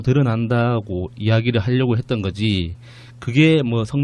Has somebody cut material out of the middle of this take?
no; 0 cuts

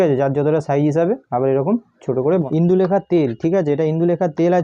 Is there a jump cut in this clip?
yes; 1 cut; at 2.4 s

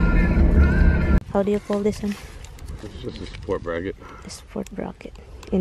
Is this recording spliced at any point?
yes; 1 cut; at 1.2 s

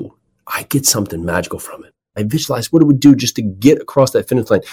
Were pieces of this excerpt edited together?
yes; 1 cut; at 2.2 s

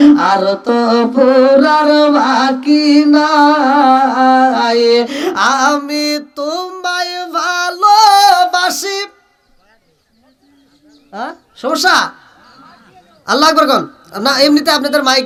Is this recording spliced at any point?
no; 0 cuts

